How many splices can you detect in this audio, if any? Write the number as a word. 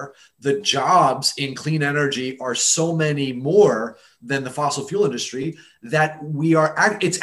zero